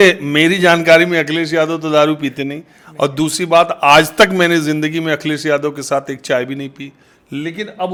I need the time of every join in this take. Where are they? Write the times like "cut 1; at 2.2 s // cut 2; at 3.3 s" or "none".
none

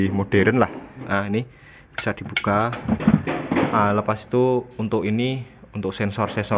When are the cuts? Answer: cut 1; at 1.0 s

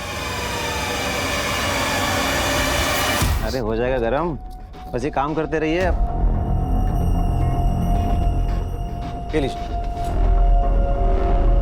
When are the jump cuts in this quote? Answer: cut 1; at 3.4 s

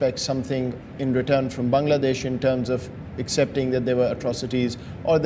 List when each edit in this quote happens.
cut 1; at 2.3 s

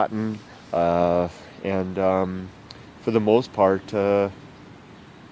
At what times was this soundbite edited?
cut 1; at 2.0 s

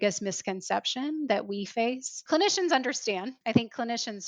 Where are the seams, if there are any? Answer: cut 1; at 2.1 s // cut 2; at 3.3 s

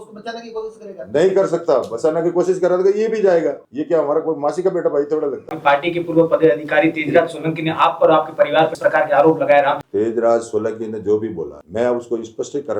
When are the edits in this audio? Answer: cut 1; at 3.7 s // cut 2; at 5.6 s // cut 3; at 8.8 s // cut 4; at 9.8 s // cut 5; at 11.6 s

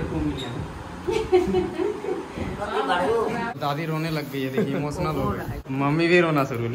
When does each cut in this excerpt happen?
cut 1; at 3.5 s // cut 2; at 5.6 s

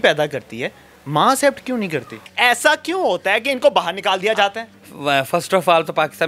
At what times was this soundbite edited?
cut 1; at 2.2 s // cut 2; at 4.6 s

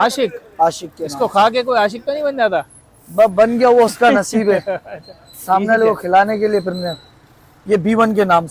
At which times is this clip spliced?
none

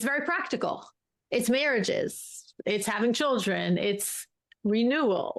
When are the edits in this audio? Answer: none

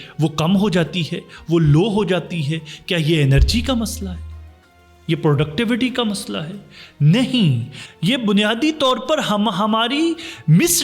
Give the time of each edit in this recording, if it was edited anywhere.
none

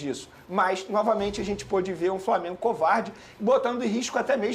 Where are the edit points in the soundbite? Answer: none

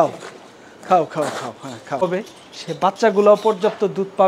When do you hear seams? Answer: cut 1; at 2.0 s

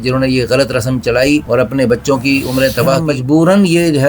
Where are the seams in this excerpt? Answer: cut 1; at 3.0 s

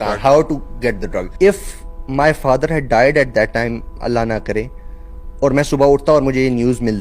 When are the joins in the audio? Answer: cut 1; at 1.2 s

